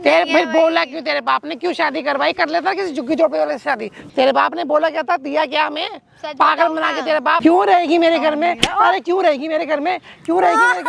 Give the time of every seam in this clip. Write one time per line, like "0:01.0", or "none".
0:03.9
0:07.4